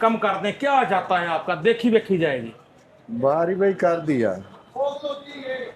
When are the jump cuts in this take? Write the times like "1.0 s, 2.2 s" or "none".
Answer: none